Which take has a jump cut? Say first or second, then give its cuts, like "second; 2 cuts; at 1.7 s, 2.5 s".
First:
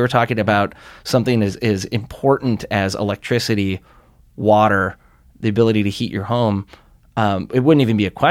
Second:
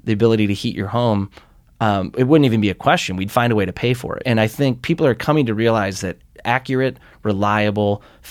second; 1 cut; at 4.2 s